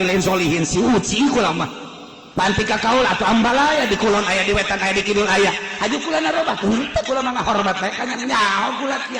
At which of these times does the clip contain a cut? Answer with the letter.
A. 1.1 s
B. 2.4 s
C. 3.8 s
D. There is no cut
B